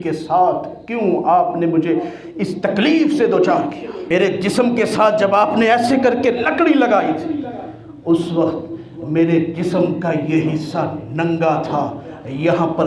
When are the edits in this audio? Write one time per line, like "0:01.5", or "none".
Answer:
0:03.9